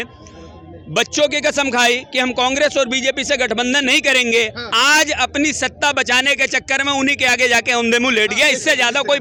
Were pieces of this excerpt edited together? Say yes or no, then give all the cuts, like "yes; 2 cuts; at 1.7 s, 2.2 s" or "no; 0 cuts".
no; 0 cuts